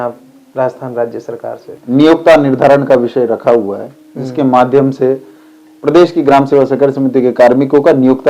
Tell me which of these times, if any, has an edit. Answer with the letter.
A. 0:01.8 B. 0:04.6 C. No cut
A